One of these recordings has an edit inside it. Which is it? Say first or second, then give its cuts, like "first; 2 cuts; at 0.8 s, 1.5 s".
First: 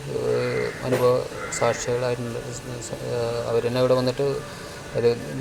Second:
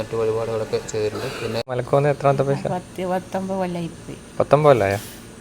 second; 1 cut; at 1.8 s